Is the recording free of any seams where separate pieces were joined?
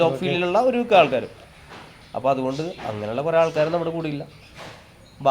yes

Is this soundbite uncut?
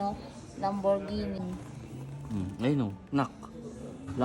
no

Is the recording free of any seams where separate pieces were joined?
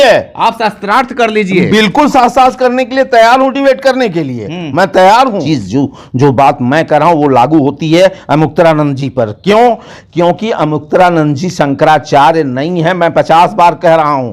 no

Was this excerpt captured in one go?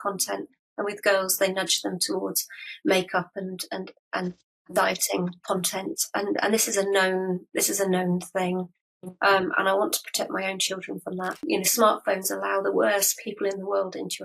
no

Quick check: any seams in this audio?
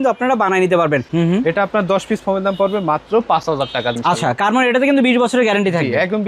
yes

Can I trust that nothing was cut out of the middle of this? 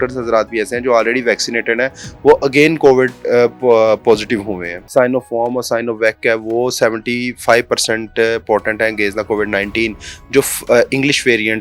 no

